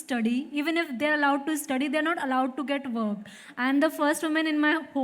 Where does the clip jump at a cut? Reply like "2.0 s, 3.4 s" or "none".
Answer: none